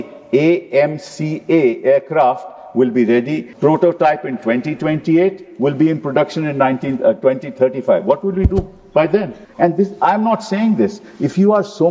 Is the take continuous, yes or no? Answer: no